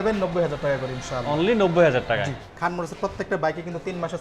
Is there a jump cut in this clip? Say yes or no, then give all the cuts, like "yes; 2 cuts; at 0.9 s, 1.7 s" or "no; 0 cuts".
yes; 1 cut; at 2.5 s